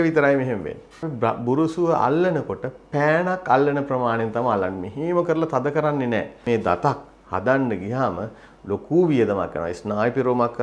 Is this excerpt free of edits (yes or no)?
no